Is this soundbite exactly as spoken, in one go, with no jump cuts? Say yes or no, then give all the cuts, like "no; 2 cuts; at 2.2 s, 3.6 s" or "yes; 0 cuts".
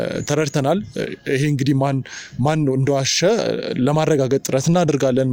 yes; 0 cuts